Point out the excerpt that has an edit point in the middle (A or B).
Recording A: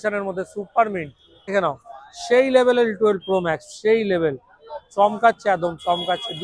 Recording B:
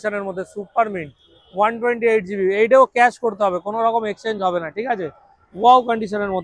A